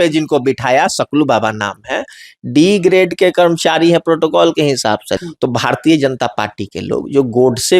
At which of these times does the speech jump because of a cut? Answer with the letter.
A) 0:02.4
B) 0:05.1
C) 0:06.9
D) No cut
B